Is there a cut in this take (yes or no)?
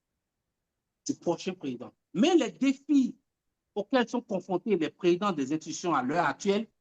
no